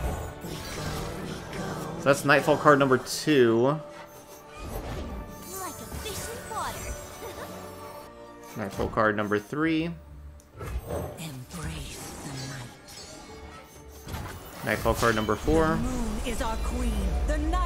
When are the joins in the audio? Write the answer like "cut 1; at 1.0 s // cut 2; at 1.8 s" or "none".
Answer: cut 1; at 8.1 s